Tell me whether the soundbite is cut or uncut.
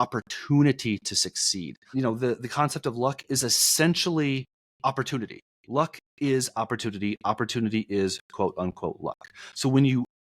cut